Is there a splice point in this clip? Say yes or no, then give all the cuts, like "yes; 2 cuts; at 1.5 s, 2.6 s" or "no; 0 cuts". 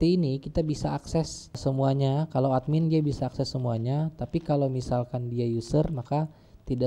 yes; 1 cut; at 1.6 s